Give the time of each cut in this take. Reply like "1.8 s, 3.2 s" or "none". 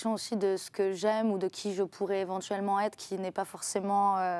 none